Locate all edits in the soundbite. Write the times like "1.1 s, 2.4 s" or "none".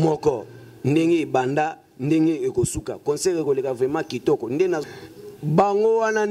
4.8 s